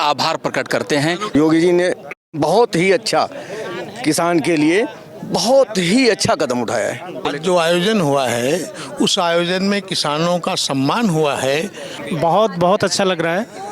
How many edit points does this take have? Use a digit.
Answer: 3